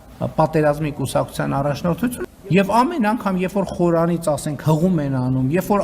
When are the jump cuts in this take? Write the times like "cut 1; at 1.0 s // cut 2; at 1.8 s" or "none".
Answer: cut 1; at 2.2 s